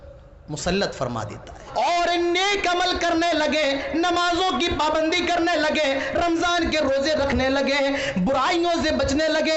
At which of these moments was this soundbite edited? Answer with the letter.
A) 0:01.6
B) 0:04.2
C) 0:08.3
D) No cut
A